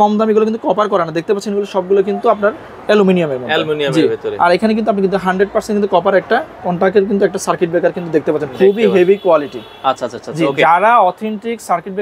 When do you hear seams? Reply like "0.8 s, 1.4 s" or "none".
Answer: none